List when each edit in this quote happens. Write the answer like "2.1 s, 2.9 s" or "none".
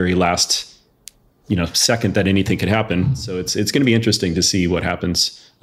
3.5 s